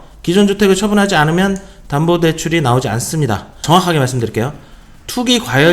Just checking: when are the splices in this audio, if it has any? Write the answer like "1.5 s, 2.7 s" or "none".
3.6 s